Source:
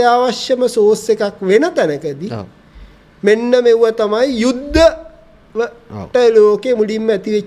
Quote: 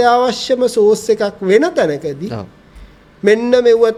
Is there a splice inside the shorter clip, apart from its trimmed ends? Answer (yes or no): no